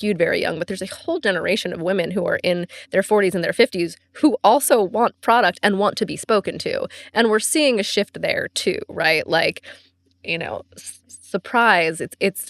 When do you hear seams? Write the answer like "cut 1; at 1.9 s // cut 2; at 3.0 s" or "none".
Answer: none